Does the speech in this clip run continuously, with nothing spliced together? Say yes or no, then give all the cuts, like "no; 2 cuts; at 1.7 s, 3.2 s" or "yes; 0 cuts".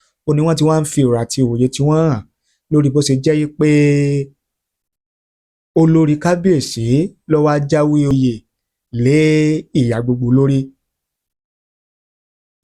no; 1 cut; at 8.1 s